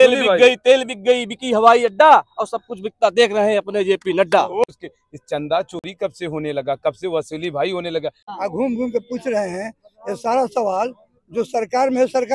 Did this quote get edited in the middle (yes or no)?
yes